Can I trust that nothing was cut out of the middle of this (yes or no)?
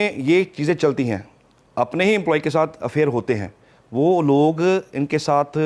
yes